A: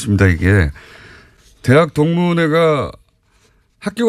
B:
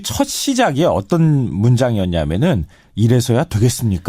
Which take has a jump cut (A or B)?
B